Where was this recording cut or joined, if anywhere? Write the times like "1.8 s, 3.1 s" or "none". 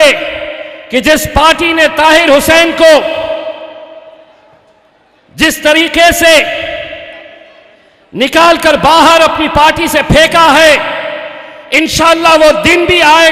none